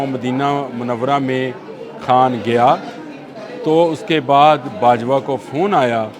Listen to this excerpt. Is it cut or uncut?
uncut